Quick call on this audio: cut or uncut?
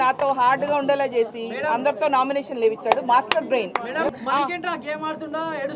cut